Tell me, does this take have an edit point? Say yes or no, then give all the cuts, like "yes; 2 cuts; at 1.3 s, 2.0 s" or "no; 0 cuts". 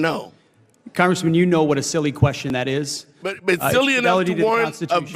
no; 0 cuts